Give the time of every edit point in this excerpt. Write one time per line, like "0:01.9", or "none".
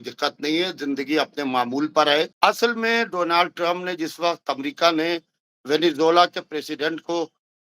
0:02.3